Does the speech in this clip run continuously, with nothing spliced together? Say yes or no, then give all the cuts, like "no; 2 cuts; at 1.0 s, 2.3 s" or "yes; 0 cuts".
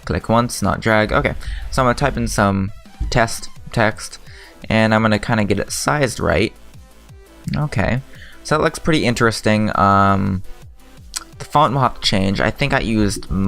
no; 1 cut; at 8.8 s